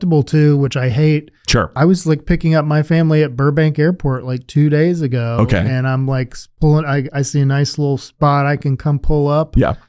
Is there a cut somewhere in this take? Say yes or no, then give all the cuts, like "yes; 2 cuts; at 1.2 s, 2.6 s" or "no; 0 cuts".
yes; 1 cut; at 1.7 s